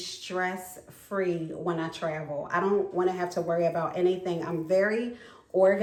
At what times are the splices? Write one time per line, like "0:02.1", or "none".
none